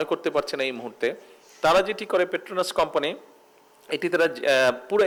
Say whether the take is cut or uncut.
uncut